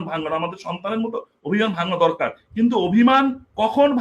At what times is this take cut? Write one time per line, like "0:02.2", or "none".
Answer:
none